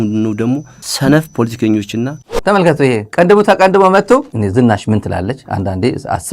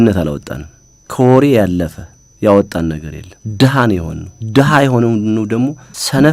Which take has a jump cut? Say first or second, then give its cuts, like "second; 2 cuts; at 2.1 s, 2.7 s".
first; 2 cuts; at 2.4 s, 4.3 s